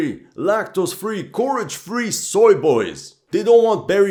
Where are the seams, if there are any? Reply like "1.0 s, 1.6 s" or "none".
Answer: none